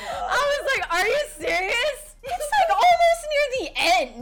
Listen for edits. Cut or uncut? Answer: cut